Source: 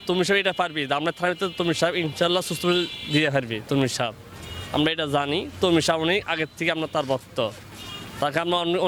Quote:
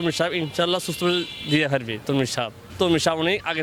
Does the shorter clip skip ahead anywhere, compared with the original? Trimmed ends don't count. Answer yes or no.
yes